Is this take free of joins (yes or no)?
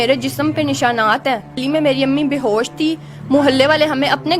no